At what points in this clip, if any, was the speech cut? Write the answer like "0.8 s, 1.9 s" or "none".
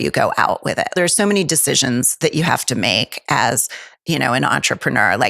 0.9 s